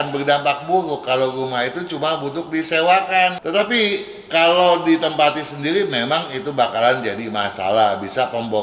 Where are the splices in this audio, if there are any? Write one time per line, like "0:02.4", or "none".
0:03.4